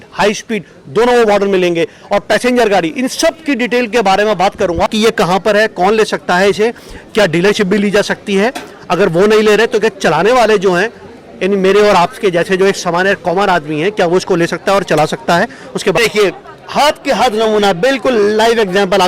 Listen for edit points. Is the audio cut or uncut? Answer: cut